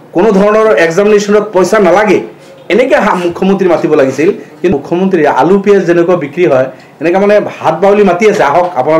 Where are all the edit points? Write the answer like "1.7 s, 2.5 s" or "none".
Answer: 4.7 s

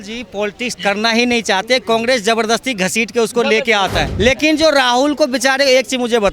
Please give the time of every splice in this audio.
4.0 s

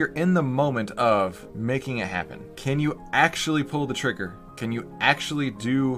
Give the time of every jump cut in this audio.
1.4 s, 2.4 s, 4.4 s

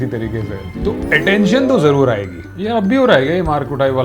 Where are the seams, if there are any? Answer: 2.6 s

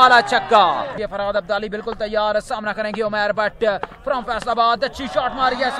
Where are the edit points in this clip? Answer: 1.0 s

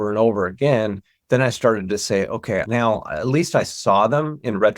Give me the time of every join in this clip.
2.7 s

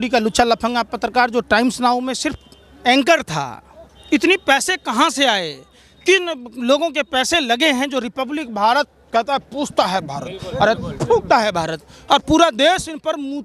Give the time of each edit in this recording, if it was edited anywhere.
none

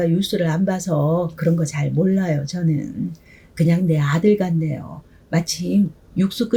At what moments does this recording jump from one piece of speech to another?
none

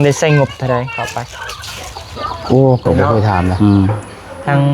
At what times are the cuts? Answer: 3.5 s

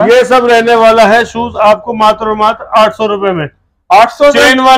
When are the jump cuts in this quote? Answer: none

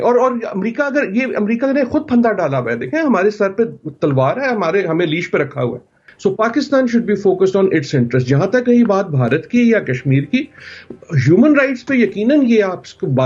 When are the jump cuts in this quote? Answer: 6.0 s

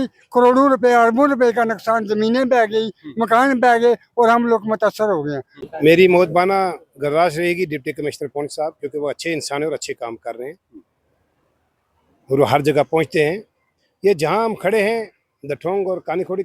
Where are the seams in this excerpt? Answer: 5.6 s

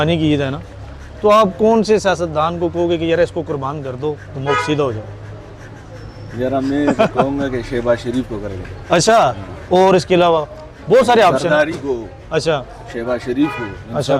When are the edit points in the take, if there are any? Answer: none

